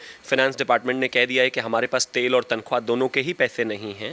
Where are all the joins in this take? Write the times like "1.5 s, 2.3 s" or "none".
none